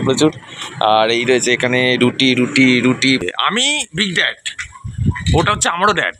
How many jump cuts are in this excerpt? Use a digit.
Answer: 1